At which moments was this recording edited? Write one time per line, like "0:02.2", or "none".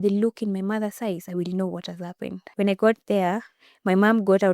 0:02.4